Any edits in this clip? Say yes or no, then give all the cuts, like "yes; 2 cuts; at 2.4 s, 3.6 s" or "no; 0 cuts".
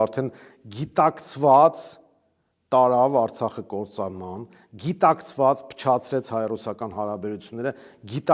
no; 0 cuts